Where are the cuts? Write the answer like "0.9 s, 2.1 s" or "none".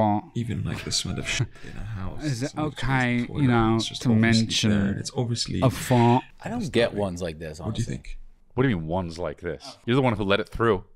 6.4 s, 9.8 s